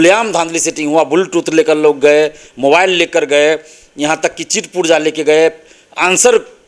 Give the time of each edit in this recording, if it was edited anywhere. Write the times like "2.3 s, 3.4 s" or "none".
none